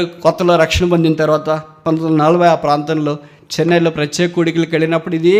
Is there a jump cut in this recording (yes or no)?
no